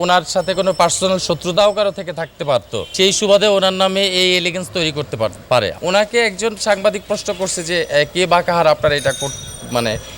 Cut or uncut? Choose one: cut